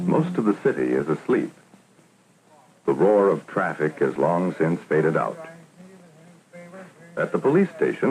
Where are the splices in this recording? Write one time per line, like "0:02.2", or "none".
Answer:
0:04.4